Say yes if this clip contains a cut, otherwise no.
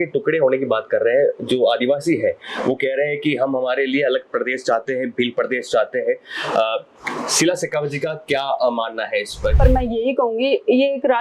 yes